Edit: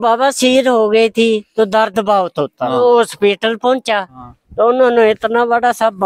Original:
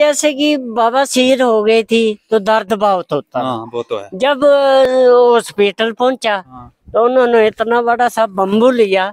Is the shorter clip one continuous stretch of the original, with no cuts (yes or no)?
no